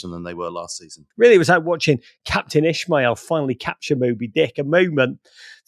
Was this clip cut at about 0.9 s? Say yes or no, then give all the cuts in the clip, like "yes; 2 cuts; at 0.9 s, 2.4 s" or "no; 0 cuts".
yes; 1 cut; at 0.9 s